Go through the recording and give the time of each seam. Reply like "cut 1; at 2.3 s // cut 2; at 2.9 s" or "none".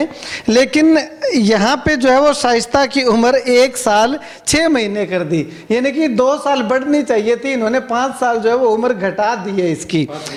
none